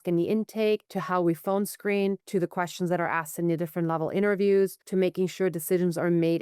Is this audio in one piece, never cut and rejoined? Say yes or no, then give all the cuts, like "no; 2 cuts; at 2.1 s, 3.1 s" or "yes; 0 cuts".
no; 3 cuts; at 0.9 s, 2.2 s, 4.8 s